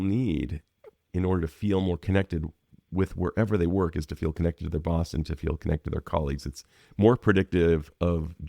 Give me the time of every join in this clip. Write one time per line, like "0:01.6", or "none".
0:01.0